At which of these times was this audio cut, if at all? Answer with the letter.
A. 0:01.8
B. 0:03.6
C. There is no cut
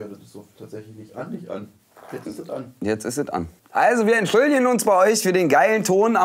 B